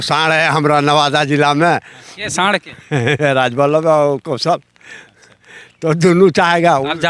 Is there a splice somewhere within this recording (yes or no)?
no